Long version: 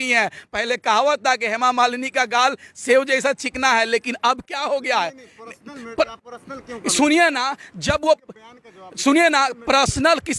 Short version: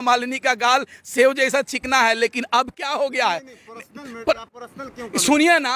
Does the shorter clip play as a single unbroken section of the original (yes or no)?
yes